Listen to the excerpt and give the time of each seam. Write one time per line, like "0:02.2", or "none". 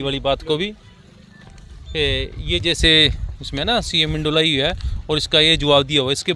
none